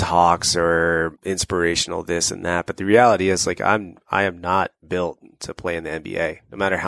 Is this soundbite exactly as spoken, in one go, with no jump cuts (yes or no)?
no